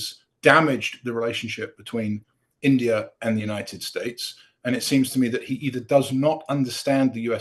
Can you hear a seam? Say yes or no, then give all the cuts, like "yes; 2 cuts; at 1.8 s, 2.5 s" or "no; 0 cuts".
no; 0 cuts